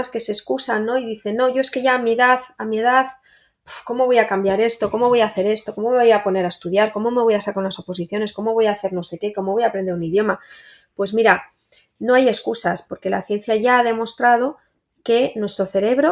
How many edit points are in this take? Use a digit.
0